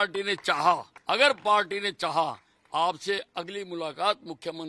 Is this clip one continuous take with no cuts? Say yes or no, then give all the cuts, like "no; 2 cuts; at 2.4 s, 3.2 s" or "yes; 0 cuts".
no; 1 cut; at 0.9 s